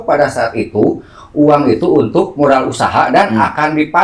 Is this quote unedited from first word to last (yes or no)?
yes